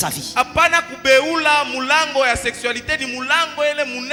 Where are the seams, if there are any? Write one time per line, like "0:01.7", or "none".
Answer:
none